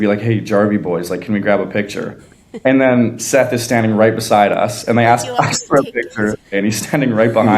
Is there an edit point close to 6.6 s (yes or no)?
yes